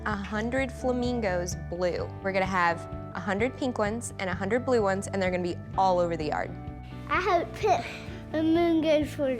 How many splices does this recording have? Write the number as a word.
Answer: one